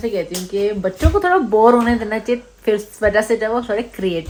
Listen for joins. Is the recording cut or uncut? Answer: uncut